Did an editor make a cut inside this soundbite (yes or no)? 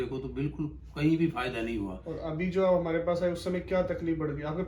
no